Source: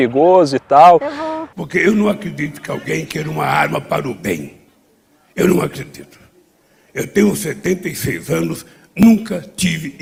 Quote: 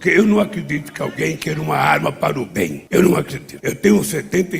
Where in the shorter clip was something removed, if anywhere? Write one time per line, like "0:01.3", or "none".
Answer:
0:02.8
0:03.4